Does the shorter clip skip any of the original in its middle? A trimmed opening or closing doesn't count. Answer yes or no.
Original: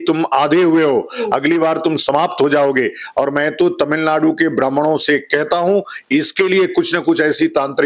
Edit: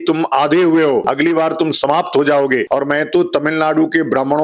yes